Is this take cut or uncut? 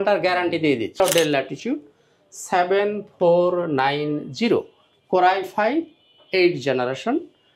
cut